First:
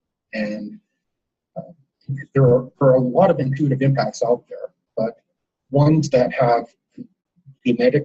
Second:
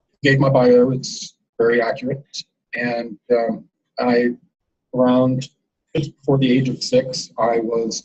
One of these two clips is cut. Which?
first; 1 cut; at 1.7 s

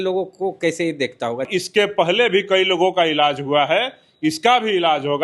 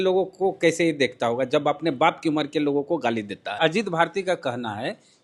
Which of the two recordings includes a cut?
first; 1 cut; at 1.5 s

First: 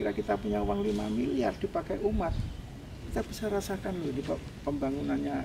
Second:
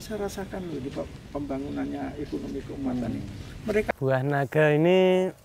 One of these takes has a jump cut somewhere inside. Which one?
second; 1 cut; at 3.9 s

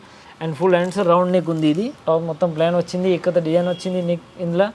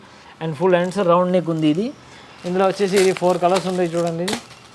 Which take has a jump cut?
first; 1 cut; at 1.9 s

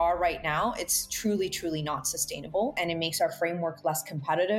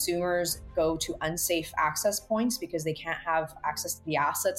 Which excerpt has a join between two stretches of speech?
first; 1 cut; at 2.7 s

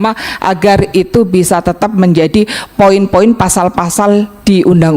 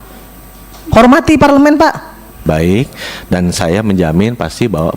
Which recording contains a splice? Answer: second; 1 cut; at 2.4 s

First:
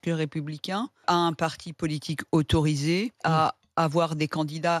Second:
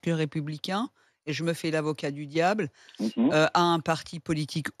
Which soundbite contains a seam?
first; 2 cuts; at 1.0 s, 3.2 s

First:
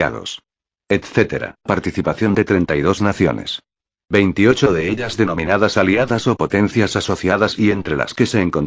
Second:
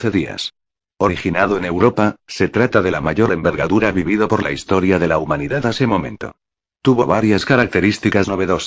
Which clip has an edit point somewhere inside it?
first; 1 cut; at 5.0 s

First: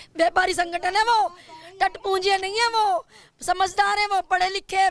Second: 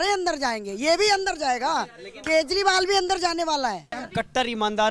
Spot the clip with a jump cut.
second; 1 cut; at 3.9 s

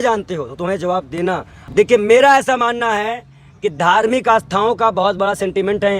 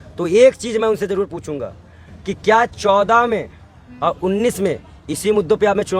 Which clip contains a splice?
first; 1 cut; at 1.6 s

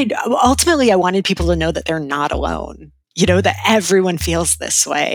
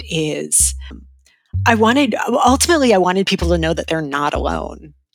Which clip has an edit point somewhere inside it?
second; 1 cut; at 1.0 s

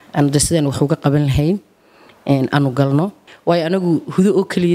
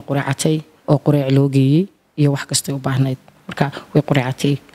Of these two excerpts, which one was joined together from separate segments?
first; 1 cut; at 3.2 s

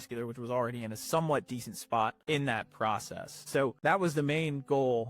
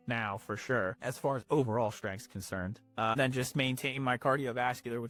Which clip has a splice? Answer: first; 2 cuts; at 2.2 s, 3.8 s

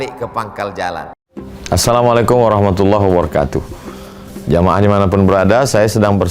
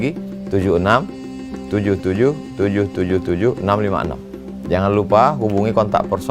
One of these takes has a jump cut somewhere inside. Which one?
first; 1 cut; at 1.2 s

